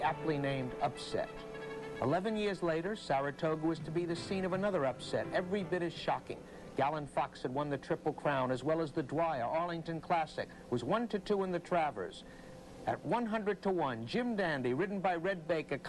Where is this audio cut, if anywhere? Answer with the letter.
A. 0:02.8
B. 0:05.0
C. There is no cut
A